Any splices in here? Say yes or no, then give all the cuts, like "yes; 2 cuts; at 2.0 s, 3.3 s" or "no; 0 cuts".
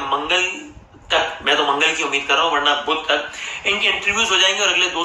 no; 0 cuts